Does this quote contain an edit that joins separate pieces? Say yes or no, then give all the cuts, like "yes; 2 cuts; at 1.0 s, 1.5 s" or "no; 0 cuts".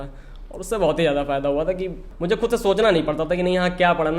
yes; 1 cut; at 2.1 s